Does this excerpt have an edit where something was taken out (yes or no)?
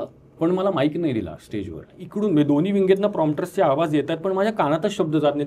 yes